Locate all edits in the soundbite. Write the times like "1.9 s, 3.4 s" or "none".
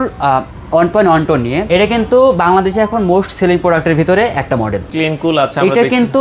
1.6 s, 4.8 s